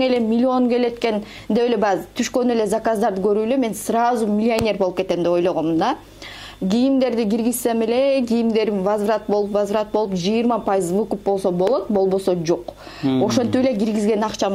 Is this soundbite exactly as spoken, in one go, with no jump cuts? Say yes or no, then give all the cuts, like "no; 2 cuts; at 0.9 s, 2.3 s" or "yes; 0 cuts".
yes; 0 cuts